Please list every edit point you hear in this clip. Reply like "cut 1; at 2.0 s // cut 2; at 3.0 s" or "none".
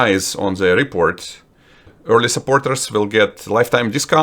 cut 1; at 1.9 s